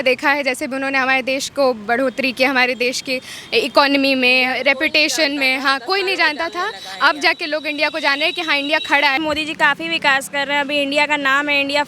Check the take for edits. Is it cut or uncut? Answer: cut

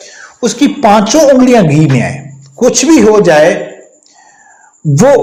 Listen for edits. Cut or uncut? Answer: uncut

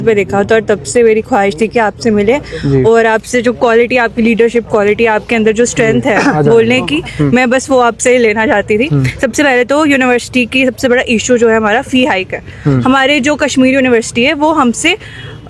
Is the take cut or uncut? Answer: uncut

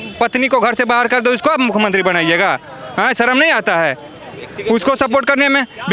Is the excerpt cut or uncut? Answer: uncut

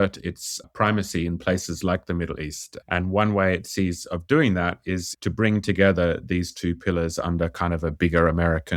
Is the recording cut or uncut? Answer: uncut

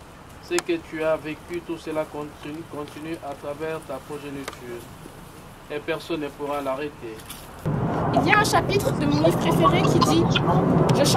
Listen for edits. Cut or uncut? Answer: cut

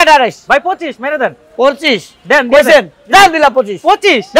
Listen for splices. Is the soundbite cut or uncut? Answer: uncut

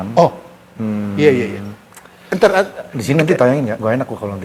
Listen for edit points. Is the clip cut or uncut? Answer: uncut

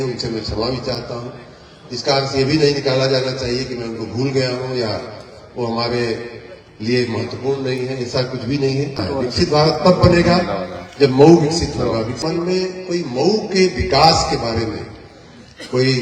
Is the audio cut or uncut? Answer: cut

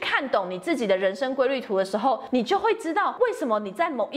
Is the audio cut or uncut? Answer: cut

